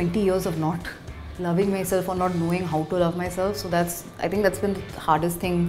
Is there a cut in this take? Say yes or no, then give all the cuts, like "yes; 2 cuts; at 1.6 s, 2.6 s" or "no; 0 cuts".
no; 0 cuts